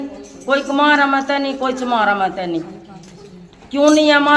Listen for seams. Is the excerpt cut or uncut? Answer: uncut